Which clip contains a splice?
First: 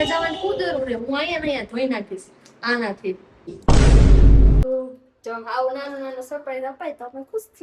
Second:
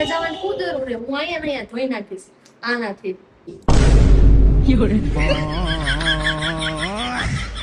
first; 1 cut; at 4.6 s

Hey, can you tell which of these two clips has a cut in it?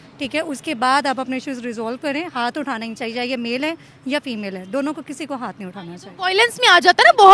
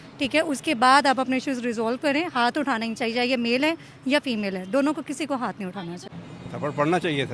second; 1 cut; at 6.1 s

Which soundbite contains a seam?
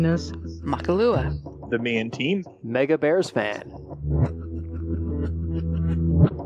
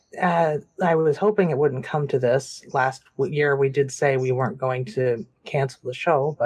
first; 1 cut; at 0.9 s

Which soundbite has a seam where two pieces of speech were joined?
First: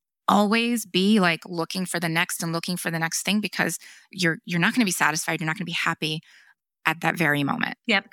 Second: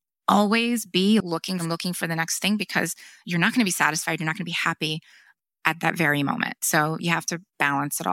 second; 3 cuts; at 1.4 s, 3.2 s, 6.6 s

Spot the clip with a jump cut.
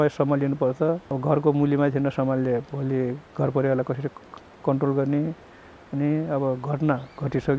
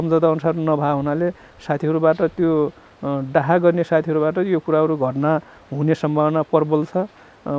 first; 1 cut; at 1.1 s

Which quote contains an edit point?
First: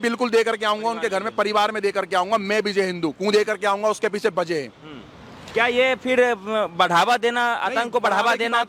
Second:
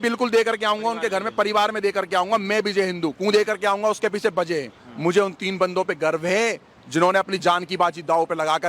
second; 1 cut; at 4.8 s

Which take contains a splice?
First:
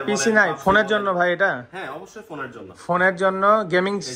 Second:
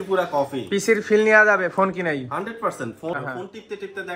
second; 1 cut; at 3.1 s

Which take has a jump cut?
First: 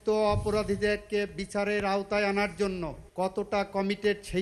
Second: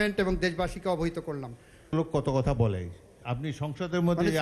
first; 1 cut; at 3.0 s

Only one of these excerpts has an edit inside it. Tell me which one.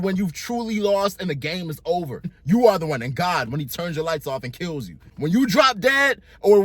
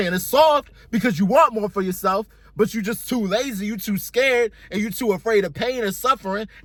first; 2 cuts; at 2.4 s, 5.0 s

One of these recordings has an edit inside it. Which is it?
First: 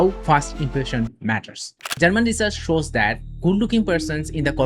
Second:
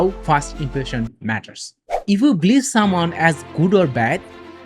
first; 1 cut; at 1.8 s

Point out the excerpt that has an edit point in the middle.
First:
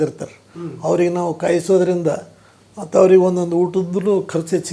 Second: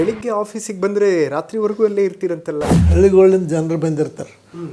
second; 1 cut; at 2.8 s

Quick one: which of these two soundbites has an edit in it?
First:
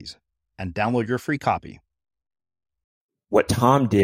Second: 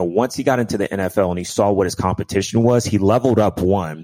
first; 1 cut; at 3.1 s

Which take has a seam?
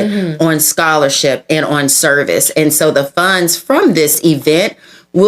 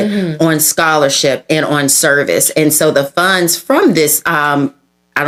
first; 1 cut; at 4.2 s

